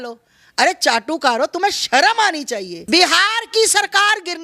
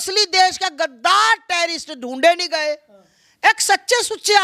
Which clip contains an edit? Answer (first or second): first